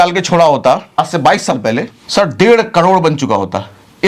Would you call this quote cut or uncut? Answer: cut